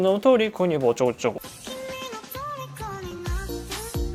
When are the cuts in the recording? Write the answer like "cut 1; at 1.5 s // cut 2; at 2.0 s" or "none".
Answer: cut 1; at 1.5 s

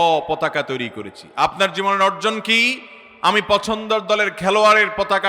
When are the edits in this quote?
none

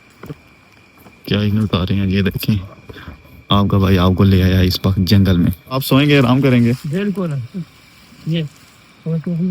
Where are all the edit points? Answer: cut 1; at 5.8 s

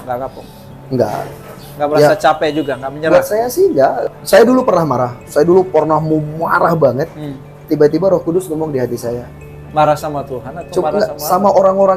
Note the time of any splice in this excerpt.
cut 1; at 4.1 s

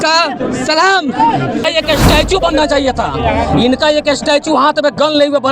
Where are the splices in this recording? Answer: cut 1; at 1.6 s

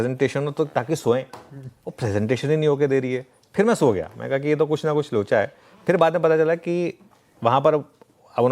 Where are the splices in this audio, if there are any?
cut 1; at 6.4 s

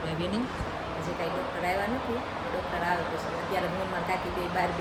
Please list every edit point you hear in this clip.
none

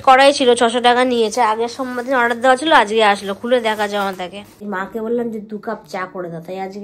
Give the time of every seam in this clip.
cut 1; at 4.6 s

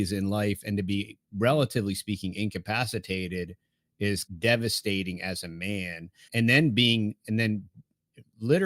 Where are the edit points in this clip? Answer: cut 1; at 4.3 s // cut 2; at 6.3 s

